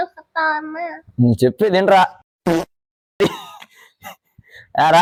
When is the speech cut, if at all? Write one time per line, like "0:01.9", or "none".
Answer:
none